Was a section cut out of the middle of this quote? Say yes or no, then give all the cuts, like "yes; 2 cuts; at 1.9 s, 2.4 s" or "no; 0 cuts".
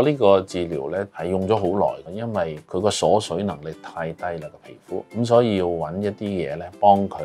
yes; 3 cuts; at 1.1 s, 2.6 s, 5.1 s